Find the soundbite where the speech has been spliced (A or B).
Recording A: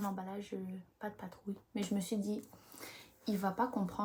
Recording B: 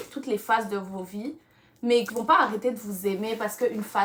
B